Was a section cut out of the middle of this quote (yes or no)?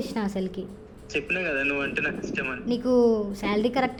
no